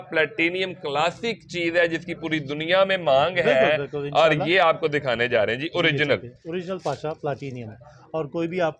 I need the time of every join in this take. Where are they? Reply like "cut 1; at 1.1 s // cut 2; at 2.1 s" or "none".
none